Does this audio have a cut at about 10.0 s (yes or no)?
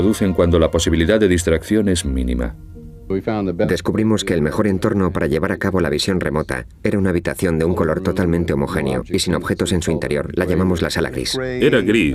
yes